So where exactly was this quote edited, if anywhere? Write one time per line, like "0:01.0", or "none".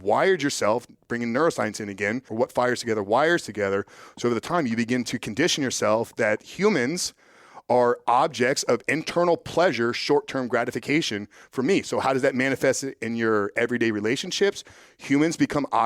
0:02.3
0:08.8